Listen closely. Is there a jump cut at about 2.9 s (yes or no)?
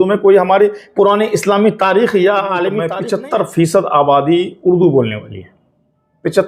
yes